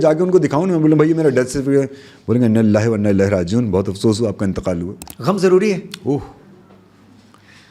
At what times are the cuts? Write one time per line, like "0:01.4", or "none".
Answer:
0:05.0